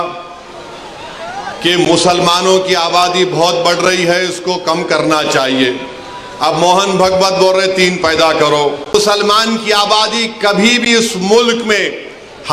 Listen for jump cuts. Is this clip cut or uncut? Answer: cut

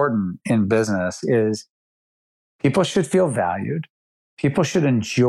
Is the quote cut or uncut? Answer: uncut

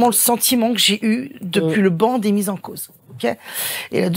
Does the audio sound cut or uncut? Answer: uncut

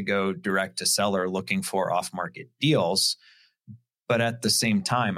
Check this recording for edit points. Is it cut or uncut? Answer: uncut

